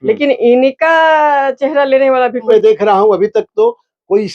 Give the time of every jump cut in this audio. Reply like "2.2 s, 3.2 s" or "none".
2.5 s